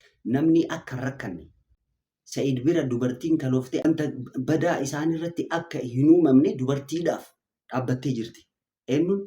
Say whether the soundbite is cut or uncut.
cut